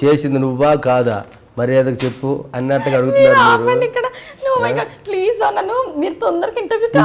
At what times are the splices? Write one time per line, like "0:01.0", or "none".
none